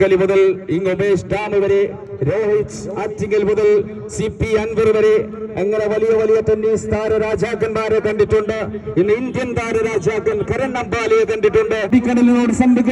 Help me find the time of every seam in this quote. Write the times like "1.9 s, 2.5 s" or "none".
11.9 s